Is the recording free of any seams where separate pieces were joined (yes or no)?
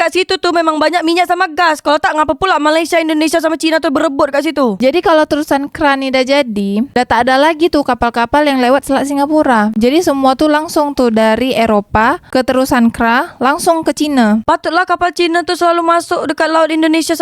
no